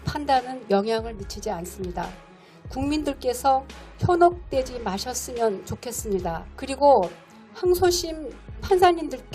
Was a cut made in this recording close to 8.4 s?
no; 1 cut; at 6.5 s

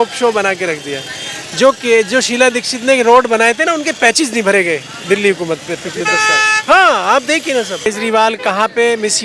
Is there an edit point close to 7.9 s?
yes; 1 cut; at 7.9 s

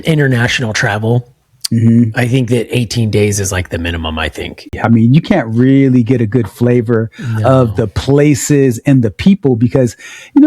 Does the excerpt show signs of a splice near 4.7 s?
yes; 1 cut; at 4.7 s

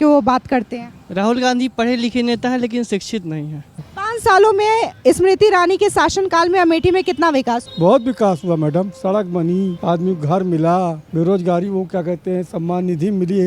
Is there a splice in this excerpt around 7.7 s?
yes; 4 cuts; at 3.9 s, 7.7 s, 9.8 s, 11.0 s

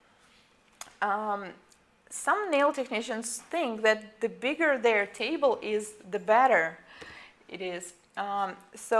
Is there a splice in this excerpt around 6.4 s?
yes; 1 cut; at 6.4 s

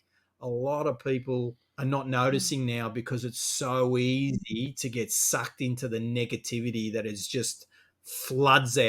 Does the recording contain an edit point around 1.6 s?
yes; 1 cut; at 1.6 s

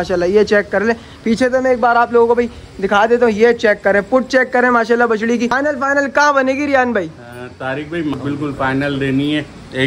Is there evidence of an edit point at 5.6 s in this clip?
yes; 2 cuts; at 5.6 s, 8.1 s

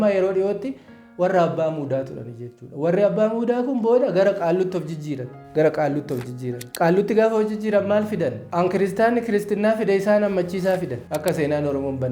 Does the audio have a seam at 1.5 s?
no; 4 cuts; at 5.3 s, 6.6 s, 8.4 s, 11.0 s

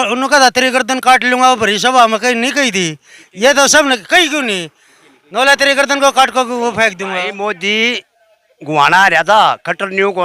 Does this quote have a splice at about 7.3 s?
yes; 1 cut; at 7.3 s

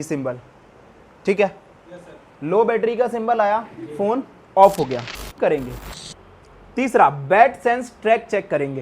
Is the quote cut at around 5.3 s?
yes; 1 cut; at 5.3 s

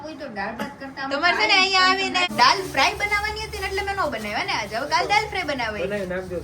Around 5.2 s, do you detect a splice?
no; 1 cut; at 2.3 s

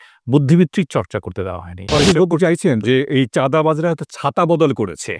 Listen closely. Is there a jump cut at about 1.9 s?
yes; 1 cut; at 1.9 s

